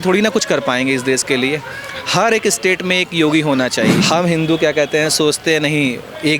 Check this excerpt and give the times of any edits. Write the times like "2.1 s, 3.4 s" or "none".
4.0 s